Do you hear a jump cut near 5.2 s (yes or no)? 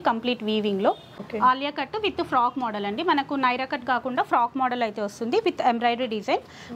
no